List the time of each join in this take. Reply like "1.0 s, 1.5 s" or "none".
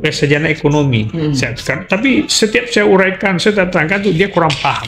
none